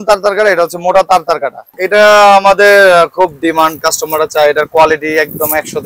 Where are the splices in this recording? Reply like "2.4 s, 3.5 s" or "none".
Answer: 1.7 s